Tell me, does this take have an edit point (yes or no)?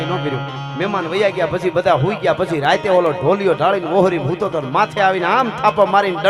no